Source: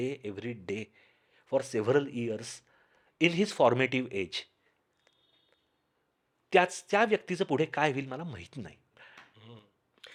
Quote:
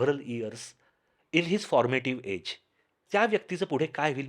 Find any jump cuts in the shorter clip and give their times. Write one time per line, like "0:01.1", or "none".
0:03.0